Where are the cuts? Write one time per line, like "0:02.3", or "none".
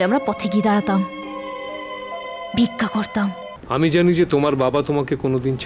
0:03.5